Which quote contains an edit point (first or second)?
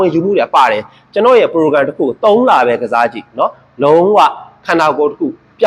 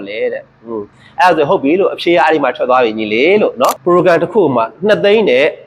second